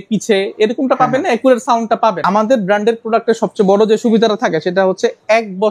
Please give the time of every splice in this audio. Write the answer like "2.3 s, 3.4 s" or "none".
2.2 s